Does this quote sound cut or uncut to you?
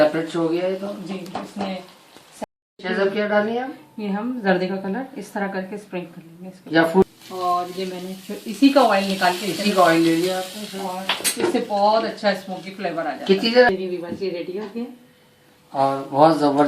cut